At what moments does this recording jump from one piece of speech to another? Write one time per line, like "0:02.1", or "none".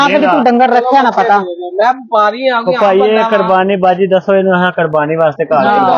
none